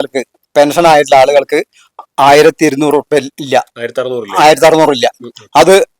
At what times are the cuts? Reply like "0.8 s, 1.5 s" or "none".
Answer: none